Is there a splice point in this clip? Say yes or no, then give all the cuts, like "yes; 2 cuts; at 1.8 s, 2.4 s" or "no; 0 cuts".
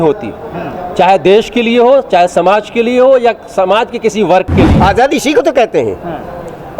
yes; 1 cut; at 4.7 s